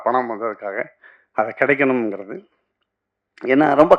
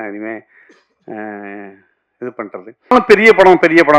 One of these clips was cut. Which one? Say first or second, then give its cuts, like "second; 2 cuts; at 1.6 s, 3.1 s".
second; 1 cut; at 2.9 s